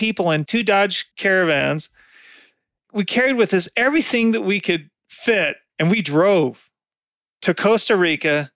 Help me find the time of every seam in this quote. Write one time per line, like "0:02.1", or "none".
0:01.1
0:05.6